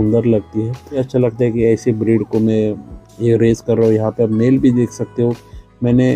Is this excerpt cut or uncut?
cut